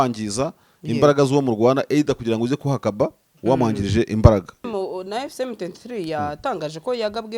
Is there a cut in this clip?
yes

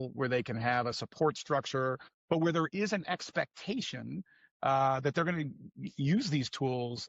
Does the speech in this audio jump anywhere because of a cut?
yes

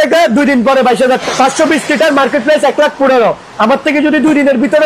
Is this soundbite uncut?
no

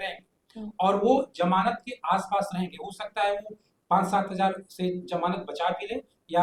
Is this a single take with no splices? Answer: yes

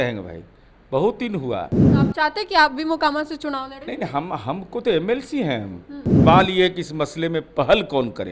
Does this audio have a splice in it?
yes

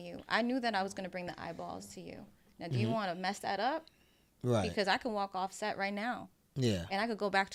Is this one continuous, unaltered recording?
yes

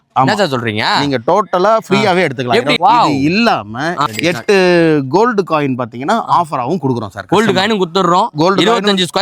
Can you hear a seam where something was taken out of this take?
yes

